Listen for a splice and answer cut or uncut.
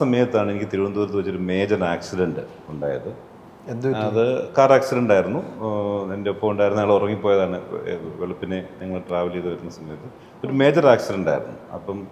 uncut